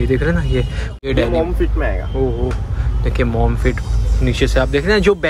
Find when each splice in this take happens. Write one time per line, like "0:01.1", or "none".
0:00.9